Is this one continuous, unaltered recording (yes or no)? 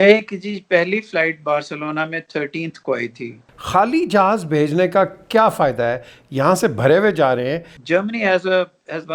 no